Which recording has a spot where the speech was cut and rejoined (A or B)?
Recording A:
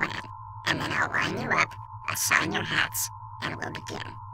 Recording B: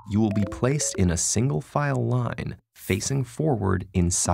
B